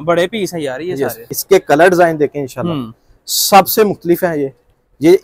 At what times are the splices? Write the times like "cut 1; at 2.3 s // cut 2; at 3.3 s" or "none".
cut 1; at 1.3 s